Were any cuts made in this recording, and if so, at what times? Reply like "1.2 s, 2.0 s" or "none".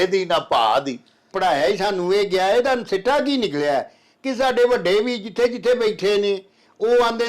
1.2 s